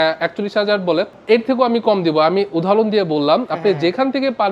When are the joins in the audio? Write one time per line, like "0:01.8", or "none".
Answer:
0:01.2